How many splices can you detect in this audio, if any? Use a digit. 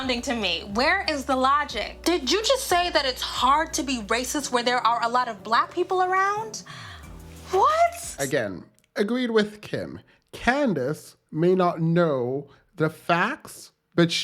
1